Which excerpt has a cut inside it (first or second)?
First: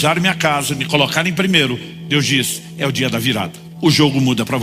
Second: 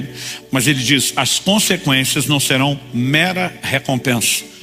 first